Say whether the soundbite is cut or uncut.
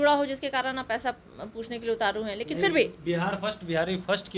uncut